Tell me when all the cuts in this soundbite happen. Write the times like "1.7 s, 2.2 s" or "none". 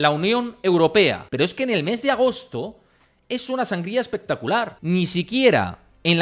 1.2 s, 4.8 s

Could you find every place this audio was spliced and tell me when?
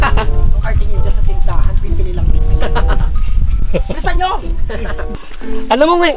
5.0 s

